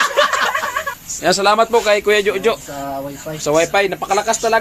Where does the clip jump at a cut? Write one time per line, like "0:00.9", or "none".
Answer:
0:01.0